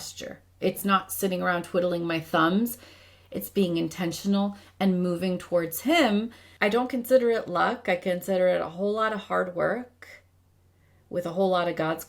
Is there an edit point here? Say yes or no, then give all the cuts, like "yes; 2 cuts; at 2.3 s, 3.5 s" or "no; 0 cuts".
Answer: yes; 1 cut; at 6.4 s